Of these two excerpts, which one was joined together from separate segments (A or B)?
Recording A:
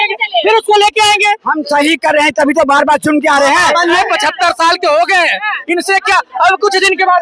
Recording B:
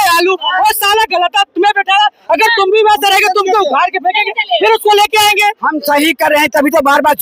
A